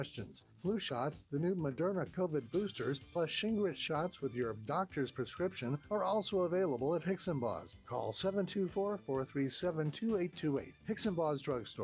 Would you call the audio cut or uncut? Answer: uncut